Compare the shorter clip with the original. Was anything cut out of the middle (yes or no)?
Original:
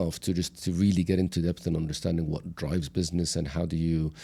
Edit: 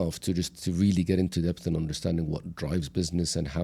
no